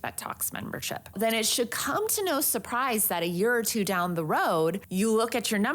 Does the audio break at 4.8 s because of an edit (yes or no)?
yes